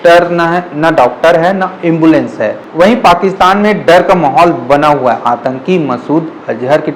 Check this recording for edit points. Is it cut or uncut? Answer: uncut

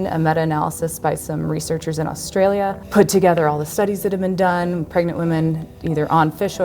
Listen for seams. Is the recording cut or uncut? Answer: cut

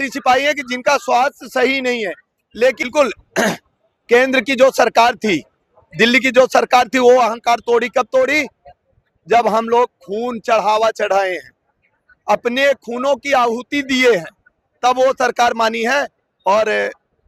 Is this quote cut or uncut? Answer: cut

